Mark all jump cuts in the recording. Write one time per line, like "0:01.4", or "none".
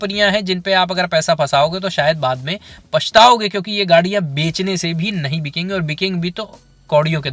none

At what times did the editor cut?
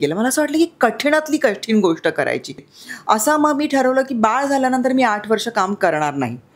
0:02.7

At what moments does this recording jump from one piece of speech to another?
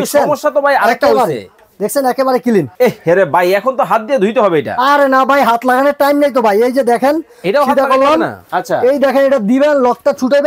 0:02.7
0:08.5

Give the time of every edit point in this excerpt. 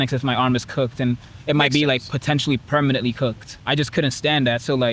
0:03.6

